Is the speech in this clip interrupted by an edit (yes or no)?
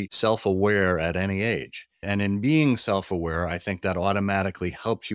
no